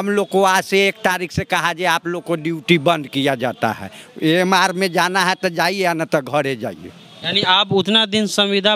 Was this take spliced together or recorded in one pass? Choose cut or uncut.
uncut